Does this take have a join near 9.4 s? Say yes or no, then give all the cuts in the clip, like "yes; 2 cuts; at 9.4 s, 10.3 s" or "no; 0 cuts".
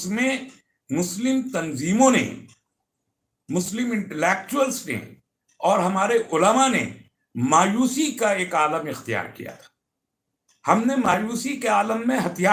no; 0 cuts